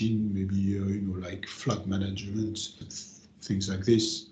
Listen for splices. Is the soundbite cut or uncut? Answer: cut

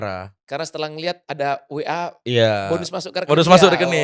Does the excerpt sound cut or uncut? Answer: uncut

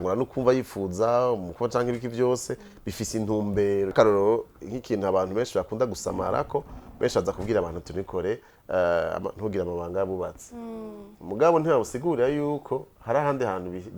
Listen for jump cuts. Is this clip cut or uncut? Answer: cut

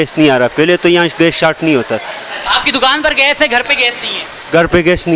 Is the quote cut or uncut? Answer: uncut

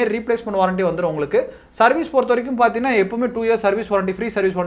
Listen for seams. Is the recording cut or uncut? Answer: uncut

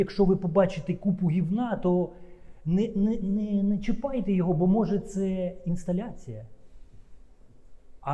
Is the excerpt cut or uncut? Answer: uncut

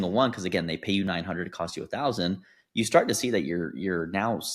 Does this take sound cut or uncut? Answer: uncut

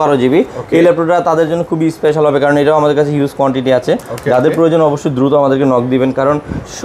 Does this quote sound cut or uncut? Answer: uncut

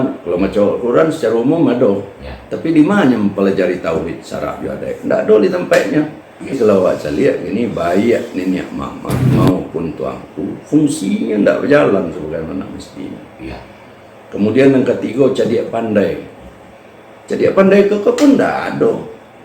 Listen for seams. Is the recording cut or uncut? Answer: cut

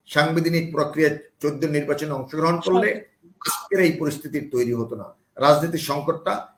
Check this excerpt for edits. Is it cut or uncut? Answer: uncut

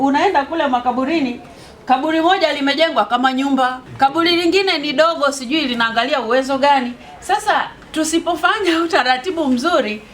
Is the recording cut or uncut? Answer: cut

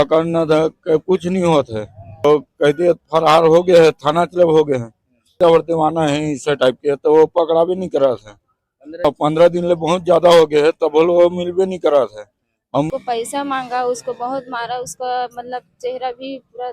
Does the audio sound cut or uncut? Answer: cut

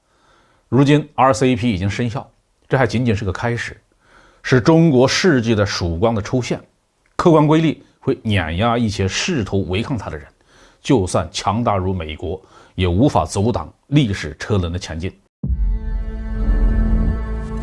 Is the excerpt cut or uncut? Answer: cut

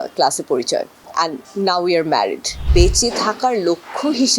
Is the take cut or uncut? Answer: cut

